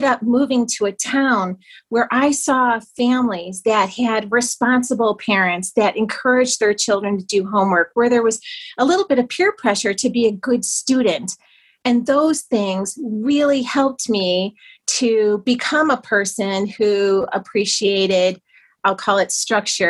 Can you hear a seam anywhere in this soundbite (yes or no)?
yes